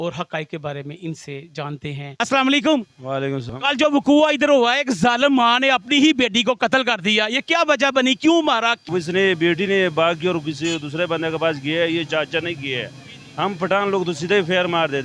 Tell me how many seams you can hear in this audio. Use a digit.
3